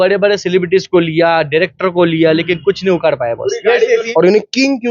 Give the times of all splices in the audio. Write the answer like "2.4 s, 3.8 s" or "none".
3.9 s